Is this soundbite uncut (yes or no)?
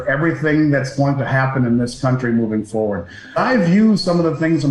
no